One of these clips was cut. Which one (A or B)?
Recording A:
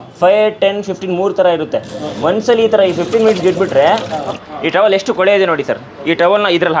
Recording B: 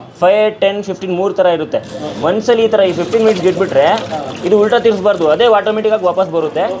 A